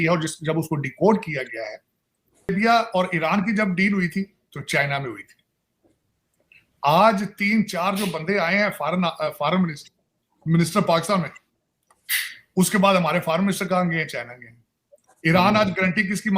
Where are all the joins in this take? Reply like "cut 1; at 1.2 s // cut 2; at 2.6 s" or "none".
cut 1; at 2.4 s